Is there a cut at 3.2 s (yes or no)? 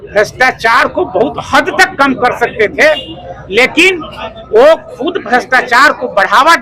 no